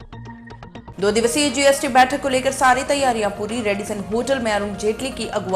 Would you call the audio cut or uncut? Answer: cut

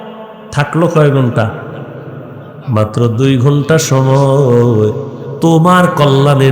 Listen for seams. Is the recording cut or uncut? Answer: uncut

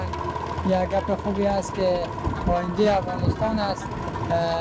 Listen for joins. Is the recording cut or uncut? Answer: uncut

